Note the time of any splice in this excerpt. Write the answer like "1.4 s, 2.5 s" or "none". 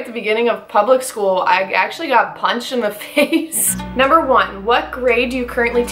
3.8 s